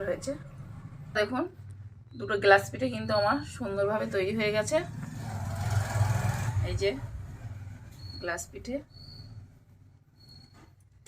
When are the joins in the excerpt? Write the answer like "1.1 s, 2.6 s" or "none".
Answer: 1.2 s